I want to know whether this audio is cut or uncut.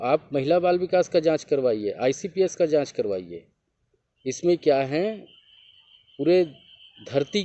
uncut